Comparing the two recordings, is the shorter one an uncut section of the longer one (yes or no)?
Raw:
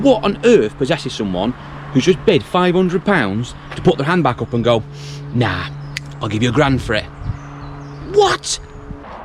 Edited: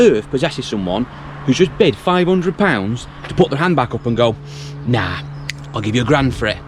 yes